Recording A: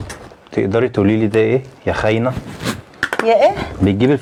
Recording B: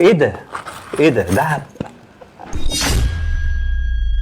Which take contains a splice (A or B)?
B